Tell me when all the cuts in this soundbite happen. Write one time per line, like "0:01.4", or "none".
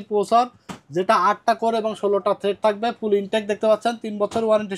none